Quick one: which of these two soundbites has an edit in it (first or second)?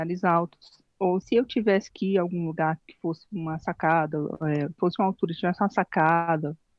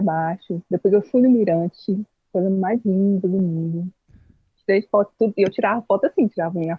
first